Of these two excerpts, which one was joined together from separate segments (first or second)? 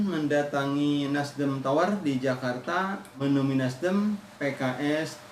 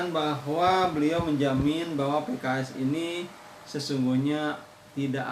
first